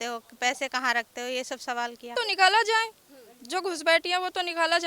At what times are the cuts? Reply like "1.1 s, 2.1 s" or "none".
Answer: 2.1 s